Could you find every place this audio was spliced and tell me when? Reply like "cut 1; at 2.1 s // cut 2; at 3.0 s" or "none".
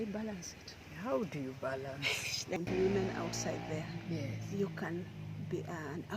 cut 1; at 2.6 s